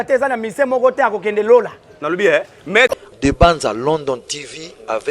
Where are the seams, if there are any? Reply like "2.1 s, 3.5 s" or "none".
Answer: 2.9 s